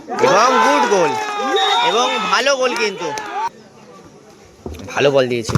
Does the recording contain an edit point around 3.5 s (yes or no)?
yes